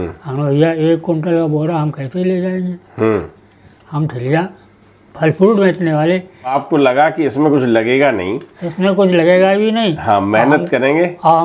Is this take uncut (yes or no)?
no